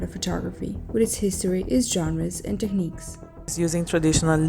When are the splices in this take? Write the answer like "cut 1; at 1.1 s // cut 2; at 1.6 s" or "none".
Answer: cut 1; at 3.5 s